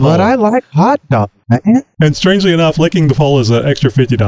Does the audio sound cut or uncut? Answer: cut